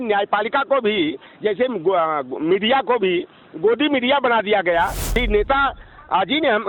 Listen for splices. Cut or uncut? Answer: cut